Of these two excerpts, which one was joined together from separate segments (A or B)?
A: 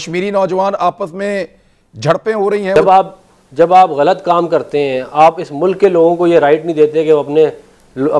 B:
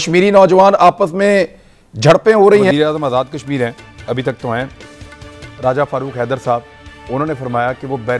B